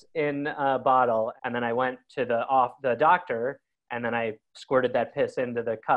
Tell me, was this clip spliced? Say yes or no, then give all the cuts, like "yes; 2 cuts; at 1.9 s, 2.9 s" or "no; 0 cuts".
yes; 1 cut; at 1.4 s